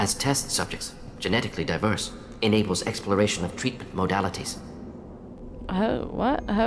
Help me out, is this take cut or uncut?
uncut